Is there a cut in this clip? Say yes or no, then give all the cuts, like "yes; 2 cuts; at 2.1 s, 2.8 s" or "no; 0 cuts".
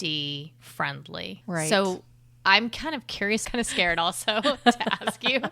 yes; 1 cut; at 3.4 s